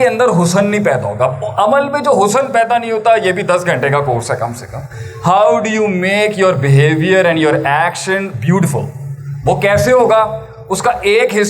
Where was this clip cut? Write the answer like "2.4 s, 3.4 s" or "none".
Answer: none